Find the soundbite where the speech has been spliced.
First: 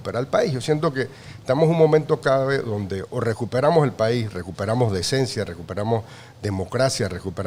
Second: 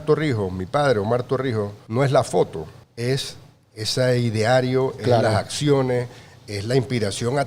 second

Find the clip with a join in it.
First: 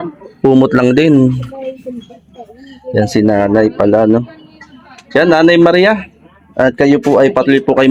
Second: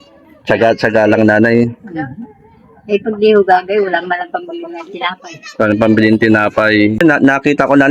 second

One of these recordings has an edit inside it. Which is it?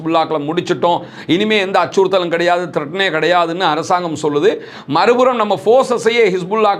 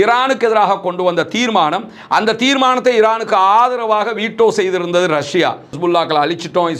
second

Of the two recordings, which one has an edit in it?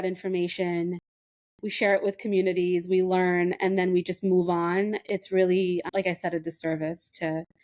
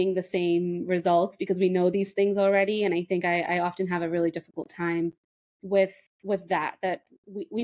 first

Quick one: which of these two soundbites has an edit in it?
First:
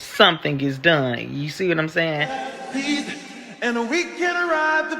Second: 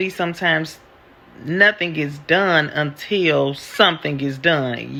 first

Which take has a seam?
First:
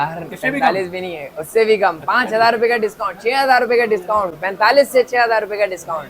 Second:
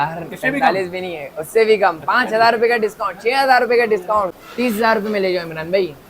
second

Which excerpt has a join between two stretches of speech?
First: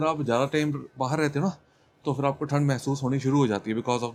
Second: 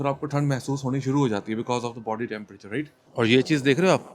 second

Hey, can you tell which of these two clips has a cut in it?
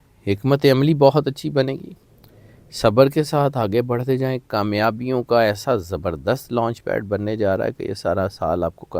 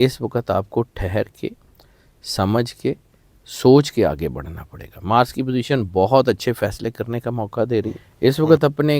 second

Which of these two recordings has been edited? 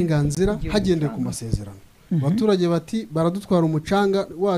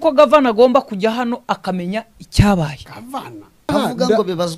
second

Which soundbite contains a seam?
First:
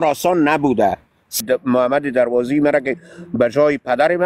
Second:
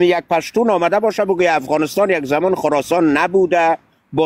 first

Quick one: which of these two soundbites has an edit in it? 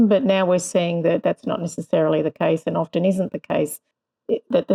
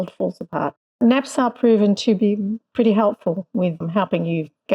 second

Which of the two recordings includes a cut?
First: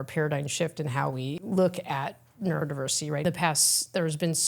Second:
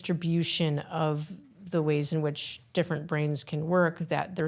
first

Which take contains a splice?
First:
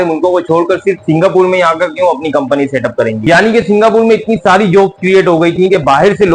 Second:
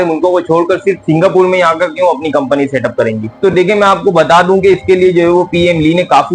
first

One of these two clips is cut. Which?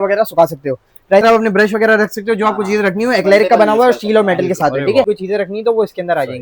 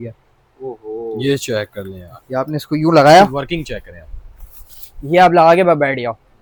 first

